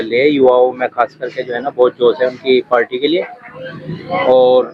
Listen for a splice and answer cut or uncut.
uncut